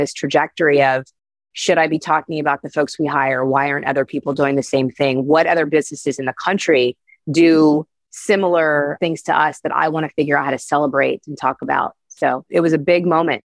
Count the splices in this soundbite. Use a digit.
2